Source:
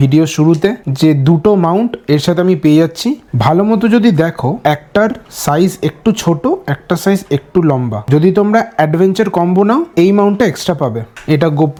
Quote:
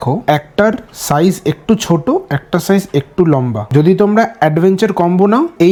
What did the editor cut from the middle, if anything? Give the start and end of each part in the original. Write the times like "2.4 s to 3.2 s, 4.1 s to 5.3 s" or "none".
none